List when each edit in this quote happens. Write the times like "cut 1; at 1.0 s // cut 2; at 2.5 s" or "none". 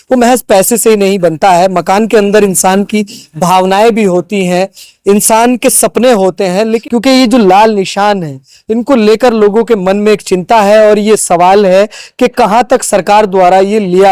cut 1; at 6.8 s